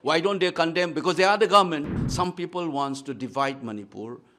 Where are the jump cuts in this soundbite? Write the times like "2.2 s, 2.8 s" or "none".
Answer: 2.0 s